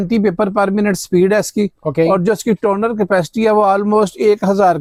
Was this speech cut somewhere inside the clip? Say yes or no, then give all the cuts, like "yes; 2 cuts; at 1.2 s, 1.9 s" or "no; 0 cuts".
no; 0 cuts